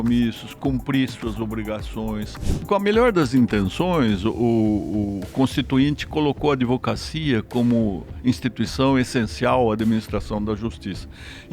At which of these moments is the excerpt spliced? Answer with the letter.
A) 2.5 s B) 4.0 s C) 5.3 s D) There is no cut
A